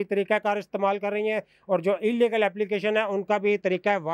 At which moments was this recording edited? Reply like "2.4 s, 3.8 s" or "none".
none